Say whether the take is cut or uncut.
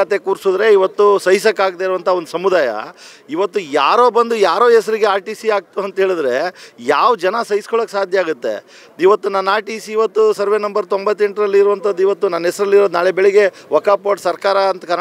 uncut